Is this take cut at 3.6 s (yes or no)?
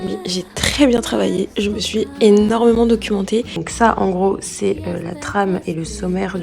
yes